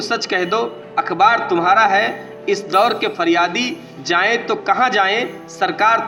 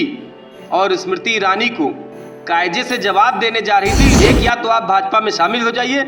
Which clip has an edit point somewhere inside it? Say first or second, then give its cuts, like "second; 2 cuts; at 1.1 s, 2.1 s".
second; 1 cut; at 4.1 s